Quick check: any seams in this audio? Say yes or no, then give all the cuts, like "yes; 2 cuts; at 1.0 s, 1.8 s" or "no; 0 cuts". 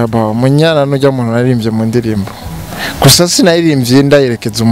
no; 0 cuts